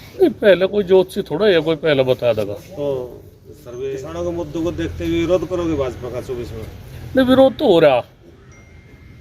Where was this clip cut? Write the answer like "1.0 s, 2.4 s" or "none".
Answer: 3.8 s